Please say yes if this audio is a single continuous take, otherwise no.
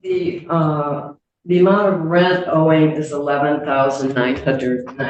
yes